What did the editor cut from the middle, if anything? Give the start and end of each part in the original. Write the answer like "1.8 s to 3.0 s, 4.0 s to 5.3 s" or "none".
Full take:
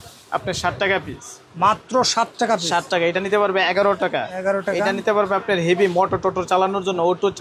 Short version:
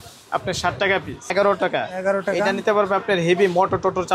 1.3 s to 3.7 s